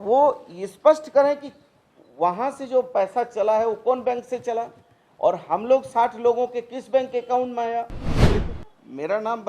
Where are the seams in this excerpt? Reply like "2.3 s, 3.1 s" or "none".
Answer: 8.2 s